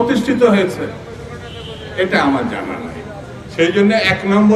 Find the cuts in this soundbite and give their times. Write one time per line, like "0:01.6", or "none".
none